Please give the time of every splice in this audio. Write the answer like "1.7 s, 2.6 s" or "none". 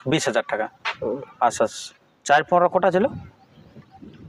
none